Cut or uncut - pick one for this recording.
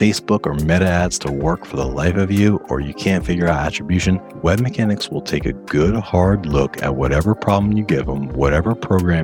uncut